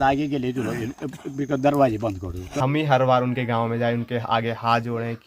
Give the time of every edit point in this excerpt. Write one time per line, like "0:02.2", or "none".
0:02.5